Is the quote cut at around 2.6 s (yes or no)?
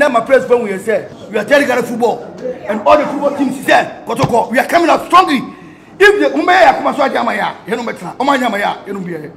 no